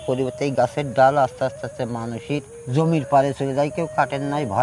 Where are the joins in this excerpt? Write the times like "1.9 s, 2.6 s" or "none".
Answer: 2.5 s